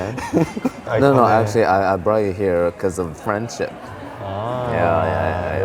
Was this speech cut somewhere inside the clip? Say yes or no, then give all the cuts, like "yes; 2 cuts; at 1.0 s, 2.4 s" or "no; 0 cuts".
no; 0 cuts